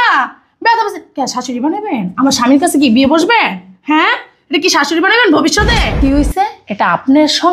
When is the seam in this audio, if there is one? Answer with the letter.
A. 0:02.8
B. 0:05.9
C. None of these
B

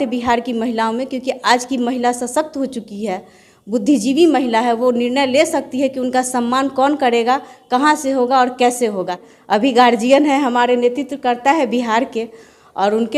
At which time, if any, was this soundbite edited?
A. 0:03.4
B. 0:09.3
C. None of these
B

